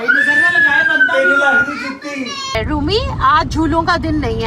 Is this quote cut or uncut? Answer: cut